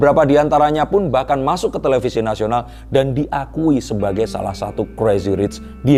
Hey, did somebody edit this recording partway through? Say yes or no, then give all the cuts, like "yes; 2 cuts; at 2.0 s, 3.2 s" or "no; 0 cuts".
no; 0 cuts